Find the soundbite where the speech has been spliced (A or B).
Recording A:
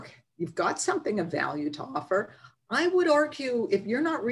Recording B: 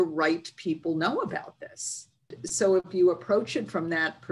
B